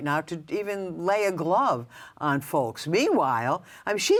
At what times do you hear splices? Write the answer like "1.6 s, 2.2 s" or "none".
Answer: none